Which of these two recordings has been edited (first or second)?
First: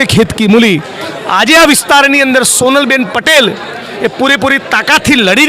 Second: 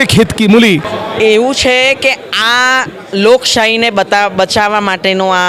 second